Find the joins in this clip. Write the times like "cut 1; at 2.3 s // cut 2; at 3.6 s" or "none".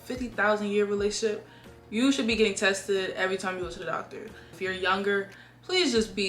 cut 1; at 4.5 s